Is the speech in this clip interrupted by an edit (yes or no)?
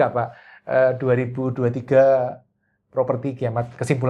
no